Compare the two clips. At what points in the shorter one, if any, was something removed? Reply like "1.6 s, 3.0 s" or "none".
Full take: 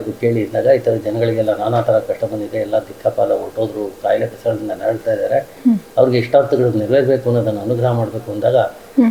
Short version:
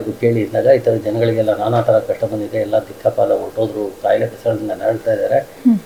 none